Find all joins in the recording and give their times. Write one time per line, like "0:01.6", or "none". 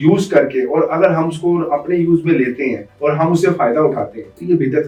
none